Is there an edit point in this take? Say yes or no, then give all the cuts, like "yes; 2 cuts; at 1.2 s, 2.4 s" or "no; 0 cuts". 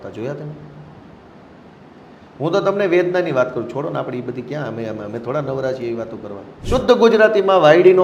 yes; 1 cut; at 6.6 s